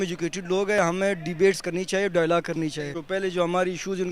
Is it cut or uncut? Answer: cut